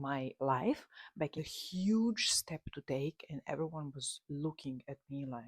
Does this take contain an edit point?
yes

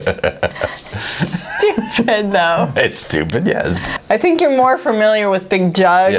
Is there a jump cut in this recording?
yes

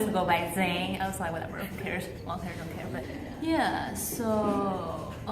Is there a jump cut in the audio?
yes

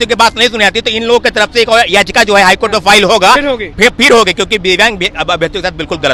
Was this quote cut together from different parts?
no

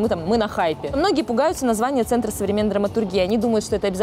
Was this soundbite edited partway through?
yes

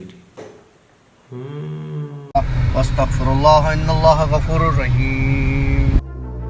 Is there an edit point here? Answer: yes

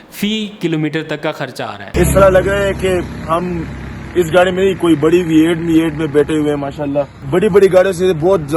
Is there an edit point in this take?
yes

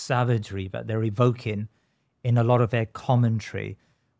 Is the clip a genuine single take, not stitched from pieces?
yes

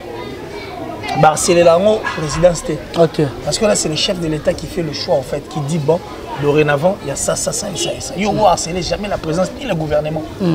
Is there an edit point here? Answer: no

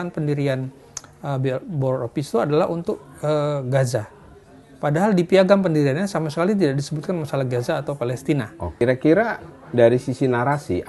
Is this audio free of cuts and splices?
yes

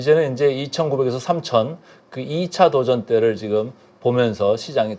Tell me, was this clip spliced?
no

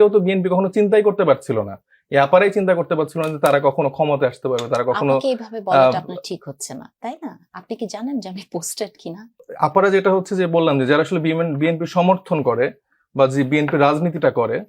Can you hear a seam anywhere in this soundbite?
yes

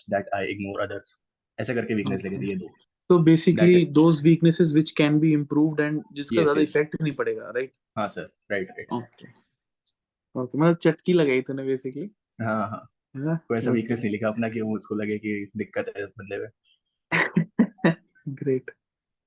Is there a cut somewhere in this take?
no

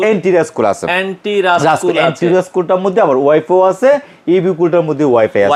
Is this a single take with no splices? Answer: yes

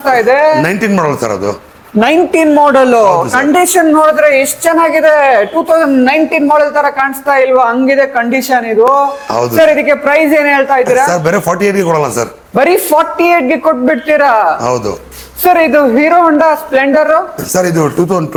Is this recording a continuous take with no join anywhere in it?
yes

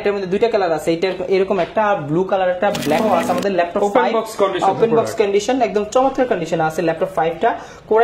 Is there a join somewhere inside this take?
yes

